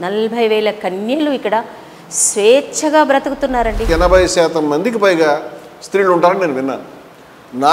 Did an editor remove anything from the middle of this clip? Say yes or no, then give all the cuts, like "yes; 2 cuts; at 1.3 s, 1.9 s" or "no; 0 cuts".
yes; 1 cut; at 3.9 s